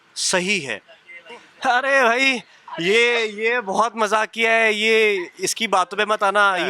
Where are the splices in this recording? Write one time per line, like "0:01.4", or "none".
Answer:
0:01.1

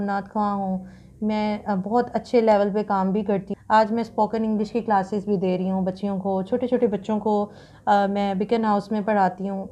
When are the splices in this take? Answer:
0:03.5

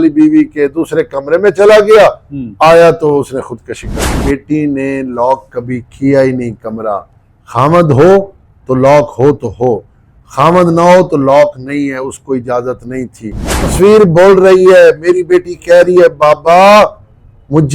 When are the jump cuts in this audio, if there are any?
0:04.2
0:13.7

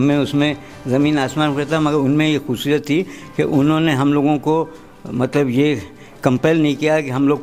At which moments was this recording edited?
none

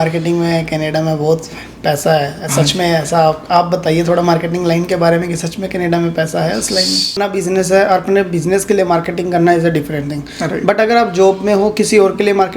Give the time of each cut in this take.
0:07.2

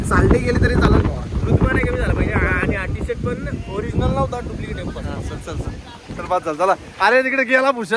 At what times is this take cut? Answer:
none

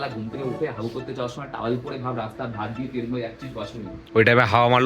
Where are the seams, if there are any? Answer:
none

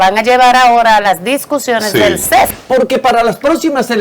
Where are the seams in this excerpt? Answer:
0:02.5

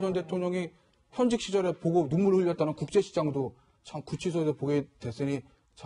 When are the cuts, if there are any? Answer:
none

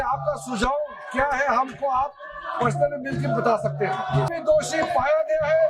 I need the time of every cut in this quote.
0:04.3

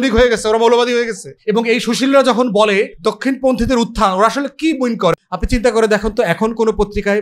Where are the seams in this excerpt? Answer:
0:01.3
0:02.9
0:05.1

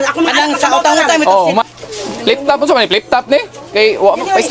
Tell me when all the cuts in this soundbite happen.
0:01.7

